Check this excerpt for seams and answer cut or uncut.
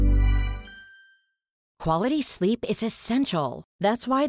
cut